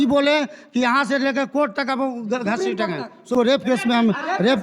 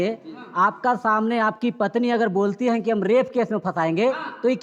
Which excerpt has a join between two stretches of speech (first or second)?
first